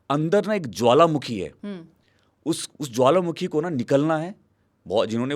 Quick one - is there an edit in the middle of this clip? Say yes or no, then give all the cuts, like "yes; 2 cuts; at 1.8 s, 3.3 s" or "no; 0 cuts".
no; 0 cuts